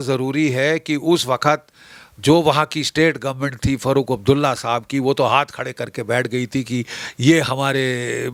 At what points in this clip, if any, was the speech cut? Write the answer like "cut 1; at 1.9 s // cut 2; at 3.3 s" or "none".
none